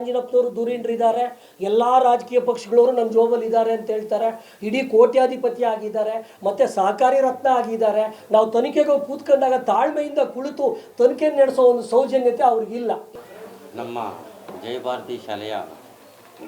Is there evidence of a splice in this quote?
yes; 1 cut; at 13.1 s

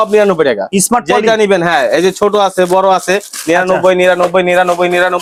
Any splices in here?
no; 0 cuts

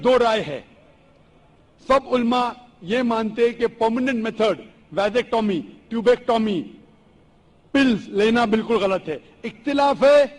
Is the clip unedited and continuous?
yes; 0 cuts

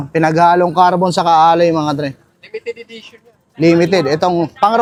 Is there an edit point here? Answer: no; 0 cuts

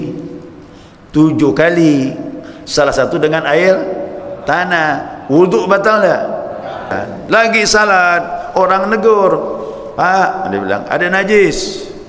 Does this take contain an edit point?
yes; 1 cut; at 7.0 s

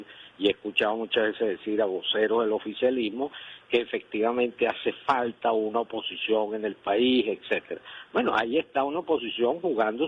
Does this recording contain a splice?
no; 0 cuts

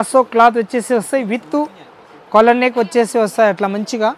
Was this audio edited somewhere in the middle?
no; 0 cuts

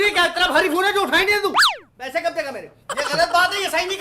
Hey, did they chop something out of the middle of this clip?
yes; 1 cut; at 2.9 s

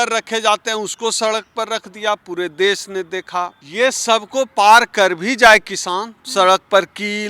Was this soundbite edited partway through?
yes; 1 cut; at 3.6 s

